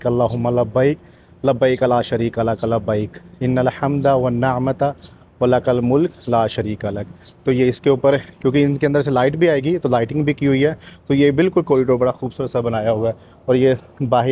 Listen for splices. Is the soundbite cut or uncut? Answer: uncut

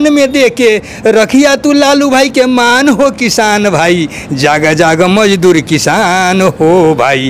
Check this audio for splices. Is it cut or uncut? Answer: uncut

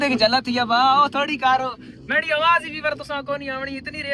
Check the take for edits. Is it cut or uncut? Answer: uncut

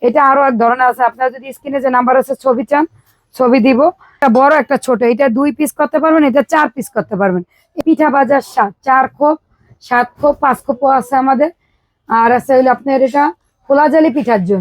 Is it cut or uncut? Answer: cut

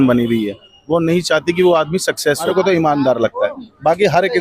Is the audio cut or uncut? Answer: cut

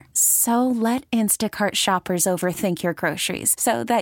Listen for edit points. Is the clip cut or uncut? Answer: uncut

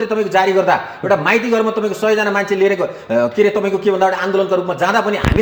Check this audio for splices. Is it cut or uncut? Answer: uncut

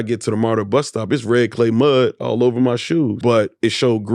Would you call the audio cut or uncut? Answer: cut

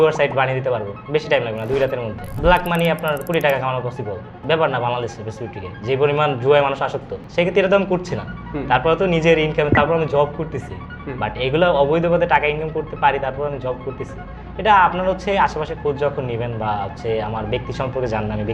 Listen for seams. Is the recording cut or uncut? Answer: cut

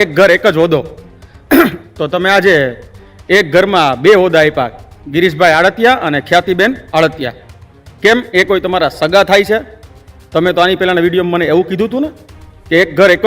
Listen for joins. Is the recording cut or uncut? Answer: uncut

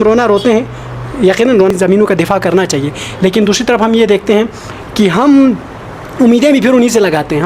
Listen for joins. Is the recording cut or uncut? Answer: cut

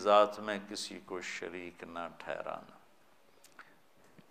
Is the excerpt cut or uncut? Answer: uncut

